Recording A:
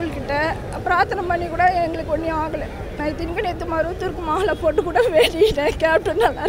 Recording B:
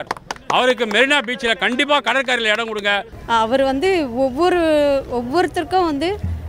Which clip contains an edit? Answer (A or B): B